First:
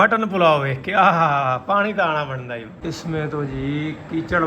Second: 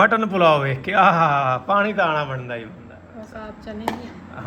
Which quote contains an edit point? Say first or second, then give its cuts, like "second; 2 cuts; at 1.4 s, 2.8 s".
first; 1 cut; at 2.7 s